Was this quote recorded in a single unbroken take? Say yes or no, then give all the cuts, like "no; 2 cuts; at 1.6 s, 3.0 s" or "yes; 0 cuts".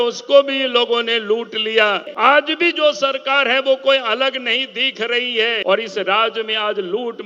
no; 2 cuts; at 2.1 s, 5.6 s